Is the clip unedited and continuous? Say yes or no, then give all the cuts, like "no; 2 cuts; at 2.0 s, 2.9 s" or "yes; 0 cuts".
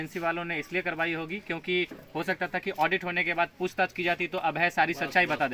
yes; 0 cuts